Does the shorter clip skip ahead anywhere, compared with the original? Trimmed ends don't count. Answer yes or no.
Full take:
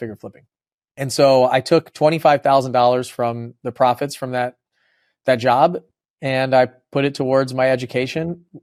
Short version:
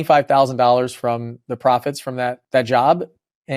yes